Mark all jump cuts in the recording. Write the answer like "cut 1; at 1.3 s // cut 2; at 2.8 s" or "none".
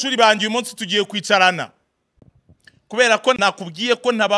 cut 1; at 3.4 s